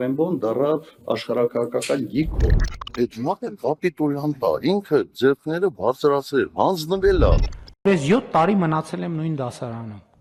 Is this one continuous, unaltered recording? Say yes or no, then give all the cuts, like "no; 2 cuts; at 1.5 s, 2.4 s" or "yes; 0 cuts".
yes; 0 cuts